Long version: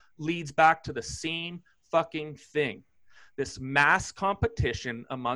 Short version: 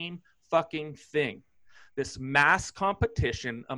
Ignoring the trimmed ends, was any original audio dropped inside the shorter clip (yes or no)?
no